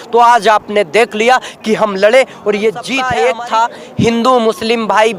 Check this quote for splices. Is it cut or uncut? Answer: cut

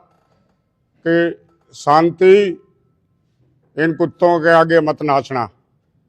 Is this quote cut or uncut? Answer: uncut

